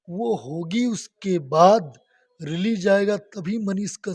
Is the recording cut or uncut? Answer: uncut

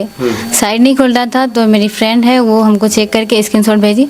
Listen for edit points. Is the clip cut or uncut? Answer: uncut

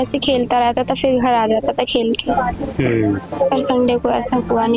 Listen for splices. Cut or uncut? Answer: uncut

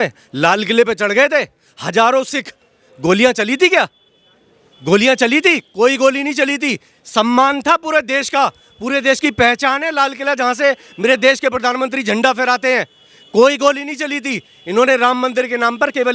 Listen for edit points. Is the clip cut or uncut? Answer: uncut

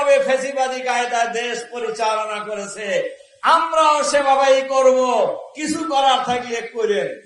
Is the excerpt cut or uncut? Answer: uncut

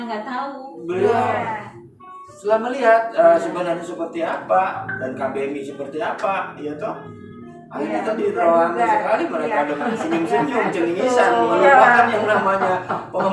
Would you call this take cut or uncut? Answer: uncut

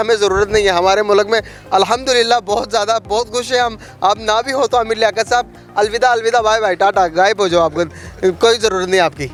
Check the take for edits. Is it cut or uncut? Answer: uncut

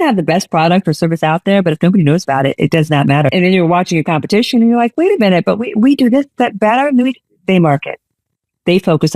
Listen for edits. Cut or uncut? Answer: cut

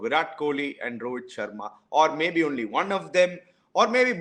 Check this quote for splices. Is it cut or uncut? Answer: uncut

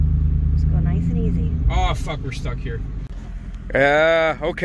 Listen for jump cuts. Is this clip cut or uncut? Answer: cut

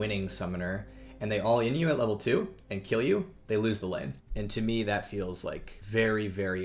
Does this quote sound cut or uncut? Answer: cut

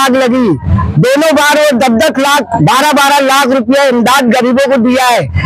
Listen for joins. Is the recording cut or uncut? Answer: uncut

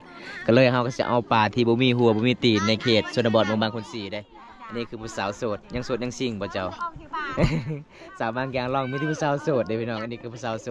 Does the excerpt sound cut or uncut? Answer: uncut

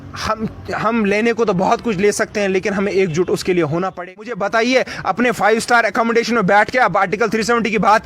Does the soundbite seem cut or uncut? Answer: cut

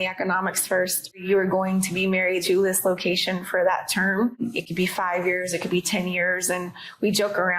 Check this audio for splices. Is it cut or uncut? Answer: cut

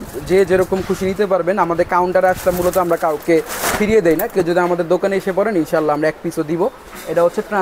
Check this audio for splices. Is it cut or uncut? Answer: uncut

